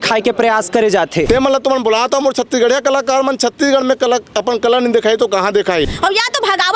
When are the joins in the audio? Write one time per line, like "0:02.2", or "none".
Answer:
0:01.3
0:05.9